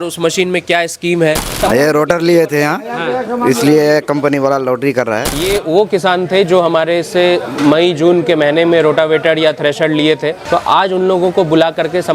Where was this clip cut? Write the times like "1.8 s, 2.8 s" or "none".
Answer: 1.5 s, 5.5 s, 10.4 s